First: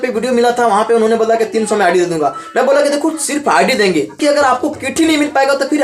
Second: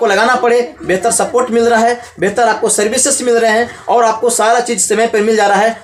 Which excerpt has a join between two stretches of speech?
first; 1 cut; at 4.2 s

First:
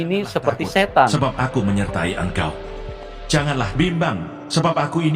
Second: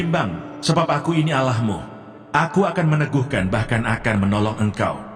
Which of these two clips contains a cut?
first; 1 cut; at 1.1 s

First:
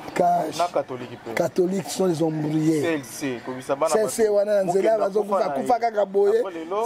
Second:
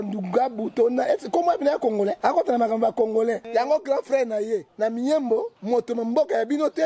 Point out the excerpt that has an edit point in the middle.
second; 4 cuts; at 2.2 s, 3.4 s, 4.7 s, 5.5 s

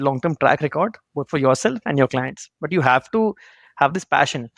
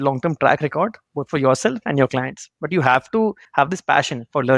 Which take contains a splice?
second; 1 cut; at 3.4 s

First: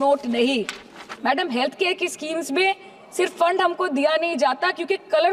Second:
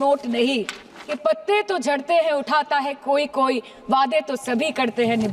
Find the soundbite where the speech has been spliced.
second; 1 cut; at 1.2 s

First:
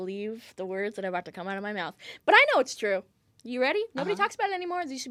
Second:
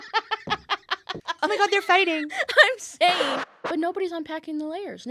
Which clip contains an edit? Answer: second; 2 cuts; at 1.1 s, 3.4 s

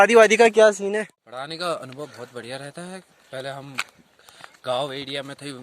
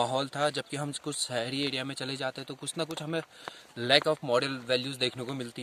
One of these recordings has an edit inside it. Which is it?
first; 1 cut; at 0.9 s

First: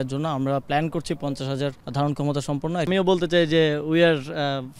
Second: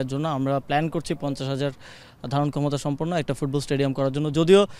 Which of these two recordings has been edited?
first; 2 cuts; at 1.8 s, 2.9 s

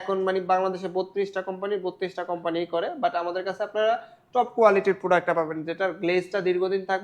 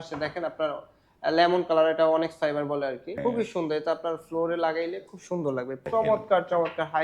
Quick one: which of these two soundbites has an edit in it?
second; 2 cuts; at 3.2 s, 5.8 s

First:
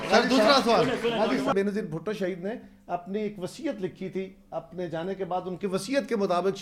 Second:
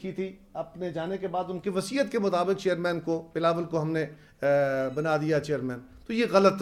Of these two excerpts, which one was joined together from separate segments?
first; 1 cut; at 1.5 s

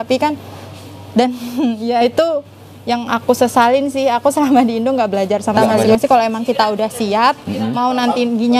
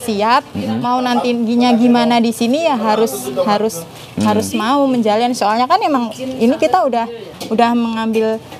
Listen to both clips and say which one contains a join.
first; 1 cut; at 6.0 s

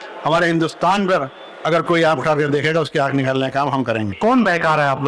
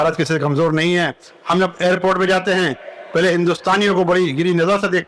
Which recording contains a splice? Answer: first; 1 cut; at 4.2 s

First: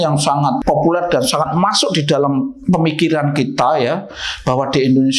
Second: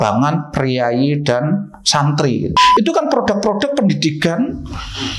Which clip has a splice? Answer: second; 1 cut; at 2.5 s

